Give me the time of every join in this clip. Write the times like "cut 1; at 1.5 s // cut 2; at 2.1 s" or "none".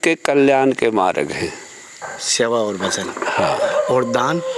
none